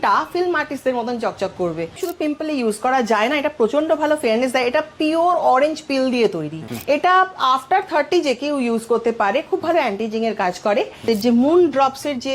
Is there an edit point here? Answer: yes; 3 cuts; at 2.0 s, 6.7 s, 11.0 s

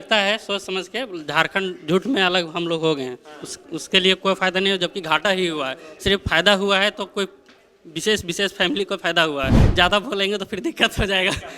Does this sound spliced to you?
yes; 1 cut; at 9.6 s

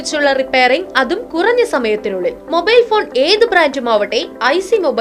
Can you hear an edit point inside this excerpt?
no; 0 cuts

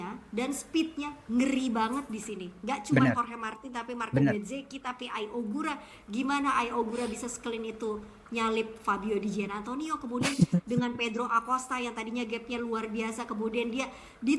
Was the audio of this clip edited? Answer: no; 0 cuts

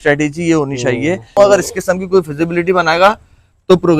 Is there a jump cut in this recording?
yes; 1 cut; at 1.3 s

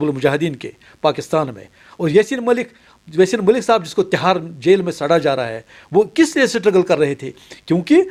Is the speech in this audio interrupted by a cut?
no; 0 cuts

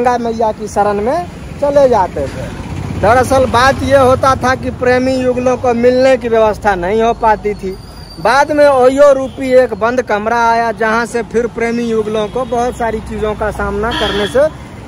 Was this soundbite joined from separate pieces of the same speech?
no; 0 cuts

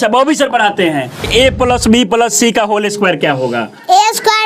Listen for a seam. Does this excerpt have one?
yes; 1 cut; at 1.2 s

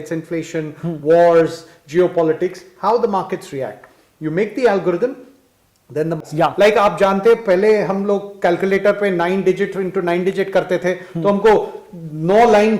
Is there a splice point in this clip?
yes; 1 cut; at 6.2 s

